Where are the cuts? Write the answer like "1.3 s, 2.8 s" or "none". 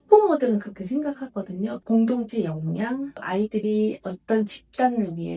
1.8 s, 3.1 s